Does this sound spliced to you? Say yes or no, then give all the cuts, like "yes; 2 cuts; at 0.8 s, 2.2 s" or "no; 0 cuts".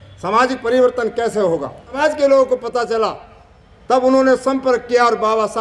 yes; 1 cut; at 1.9 s